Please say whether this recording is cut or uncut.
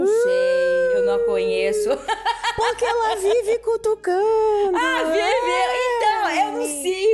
uncut